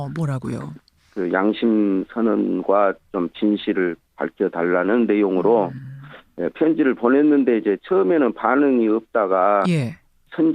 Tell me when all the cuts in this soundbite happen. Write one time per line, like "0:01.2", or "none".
0:03.0